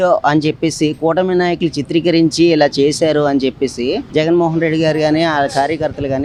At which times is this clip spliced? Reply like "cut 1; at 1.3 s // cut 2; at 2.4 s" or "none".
none